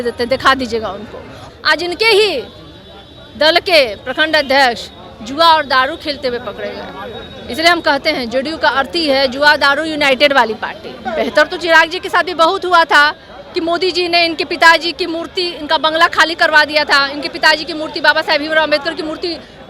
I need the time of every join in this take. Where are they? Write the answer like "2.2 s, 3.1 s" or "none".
1.4 s, 11.0 s